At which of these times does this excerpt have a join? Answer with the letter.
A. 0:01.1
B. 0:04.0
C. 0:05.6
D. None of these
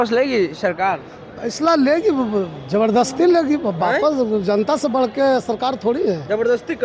D